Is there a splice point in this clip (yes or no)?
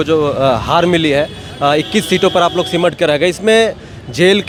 no